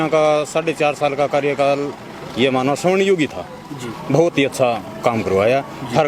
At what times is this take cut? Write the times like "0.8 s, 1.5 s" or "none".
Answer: none